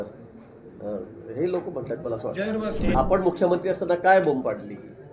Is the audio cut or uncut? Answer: cut